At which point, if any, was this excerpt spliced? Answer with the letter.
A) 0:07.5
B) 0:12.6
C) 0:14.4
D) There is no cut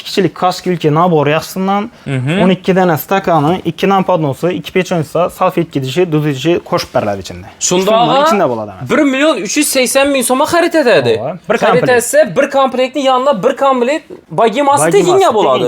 C